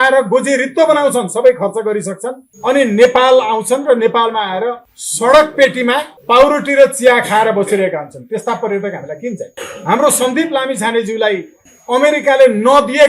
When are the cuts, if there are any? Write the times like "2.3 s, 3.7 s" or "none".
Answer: 9.5 s